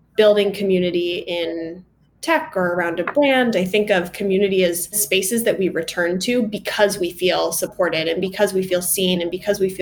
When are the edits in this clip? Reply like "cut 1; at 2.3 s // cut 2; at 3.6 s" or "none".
none